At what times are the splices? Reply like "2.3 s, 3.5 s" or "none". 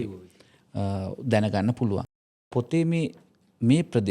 2.1 s